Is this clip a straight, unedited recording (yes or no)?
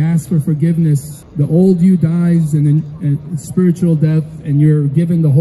no